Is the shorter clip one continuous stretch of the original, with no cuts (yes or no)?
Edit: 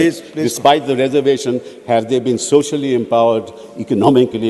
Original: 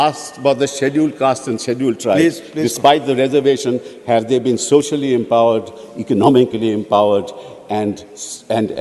yes